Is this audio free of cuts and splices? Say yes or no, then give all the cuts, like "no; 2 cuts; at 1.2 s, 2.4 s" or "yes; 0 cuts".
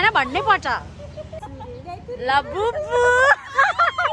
no; 1 cut; at 1.4 s